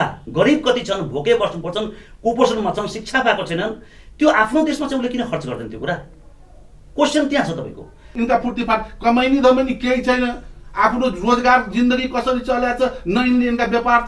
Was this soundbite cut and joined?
yes; 1 cut; at 8.1 s

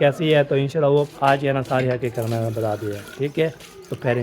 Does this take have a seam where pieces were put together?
yes; 1 cut; at 1.1 s

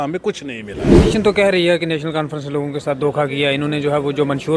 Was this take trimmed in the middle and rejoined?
yes; 1 cut; at 1.1 s

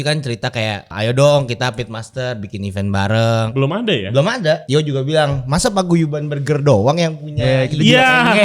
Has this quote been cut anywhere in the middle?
yes; 3 cuts; at 0.9 s, 3.5 s, 4.6 s

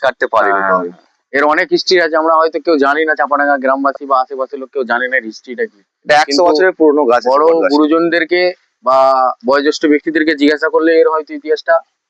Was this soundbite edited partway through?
yes; 1 cut; at 1.2 s

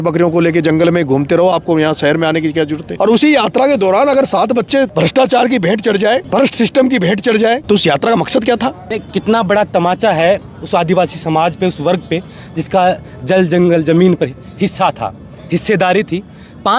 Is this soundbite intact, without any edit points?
no; 5 cuts; at 2.8 s, 4.9 s, 6.3 s, 7.6 s, 8.9 s

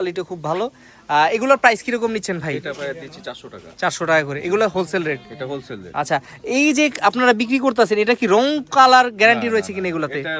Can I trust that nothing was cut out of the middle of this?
yes; 0 cuts

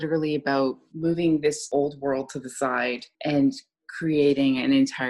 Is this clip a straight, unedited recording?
no; 3 cuts; at 0.9 s, 1.6 s, 3.1 s

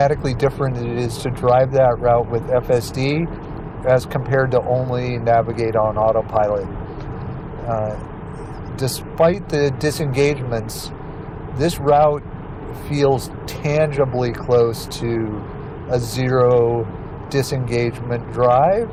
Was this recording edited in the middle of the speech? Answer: no; 0 cuts

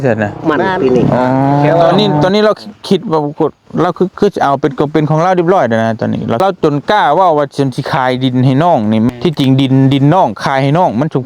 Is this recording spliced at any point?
yes; 3 cuts; at 1.9 s, 6.4 s, 9.1 s

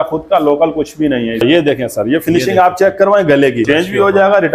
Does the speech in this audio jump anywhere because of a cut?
yes; 2 cuts; at 1.4 s, 3.6 s

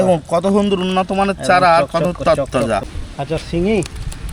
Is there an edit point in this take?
yes; 1 cut; at 3.0 s

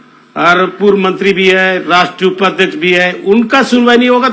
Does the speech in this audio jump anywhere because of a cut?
no; 0 cuts

